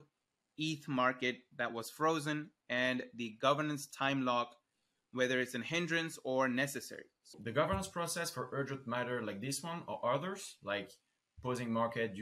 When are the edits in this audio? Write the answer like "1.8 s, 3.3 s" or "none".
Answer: 7.3 s